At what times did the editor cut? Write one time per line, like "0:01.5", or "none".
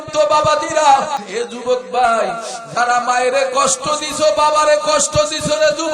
0:01.2